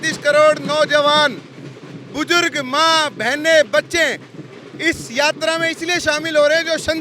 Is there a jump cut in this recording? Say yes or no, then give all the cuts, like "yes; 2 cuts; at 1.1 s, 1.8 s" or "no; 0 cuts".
no; 0 cuts